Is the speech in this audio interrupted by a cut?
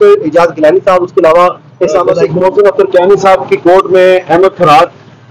yes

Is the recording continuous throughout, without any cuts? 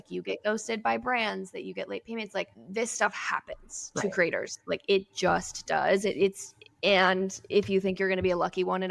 no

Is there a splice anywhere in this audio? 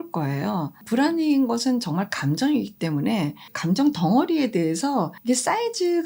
yes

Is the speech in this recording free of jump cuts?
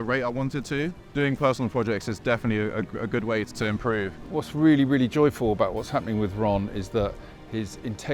no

